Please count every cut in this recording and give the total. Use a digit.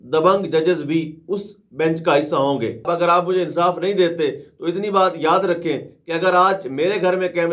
1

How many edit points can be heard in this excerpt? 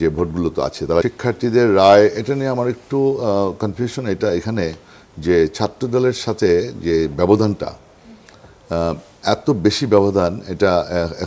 1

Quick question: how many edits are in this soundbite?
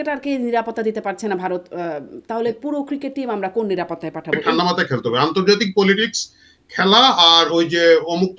1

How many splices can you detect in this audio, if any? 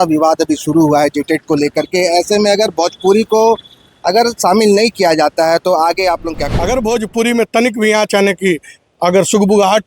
1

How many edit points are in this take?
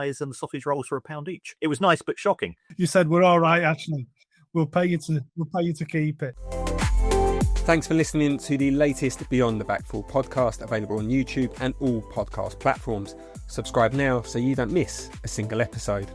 3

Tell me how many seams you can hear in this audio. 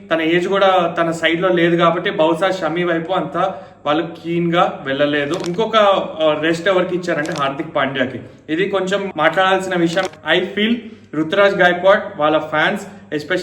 2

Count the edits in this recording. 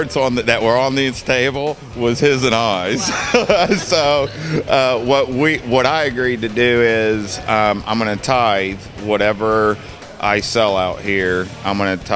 0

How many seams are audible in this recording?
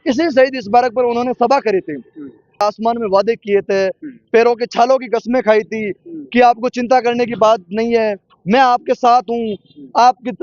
1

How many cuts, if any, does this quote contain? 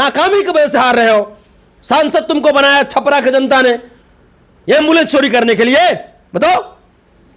0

